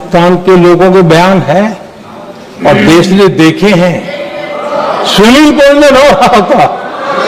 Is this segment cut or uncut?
uncut